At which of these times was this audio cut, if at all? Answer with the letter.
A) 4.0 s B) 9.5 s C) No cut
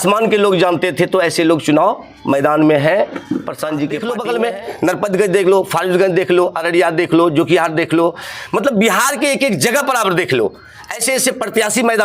A